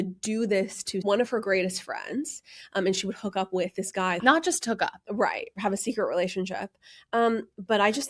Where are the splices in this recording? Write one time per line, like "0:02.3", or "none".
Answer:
0:01.0
0:04.2